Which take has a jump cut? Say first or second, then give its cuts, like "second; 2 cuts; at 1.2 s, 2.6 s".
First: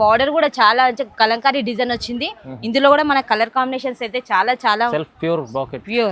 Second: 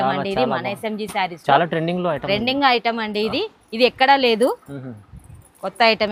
first; 1 cut; at 4.9 s